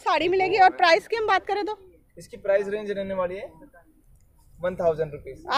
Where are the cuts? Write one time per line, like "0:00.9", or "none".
none